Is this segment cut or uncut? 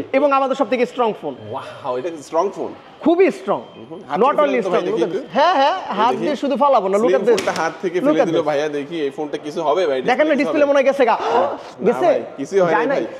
uncut